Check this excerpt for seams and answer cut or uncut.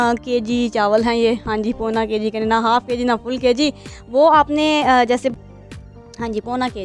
cut